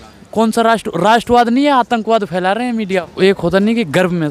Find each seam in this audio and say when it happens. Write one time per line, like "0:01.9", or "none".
0:03.0